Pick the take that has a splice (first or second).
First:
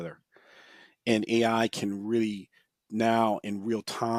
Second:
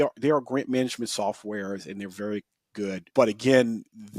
second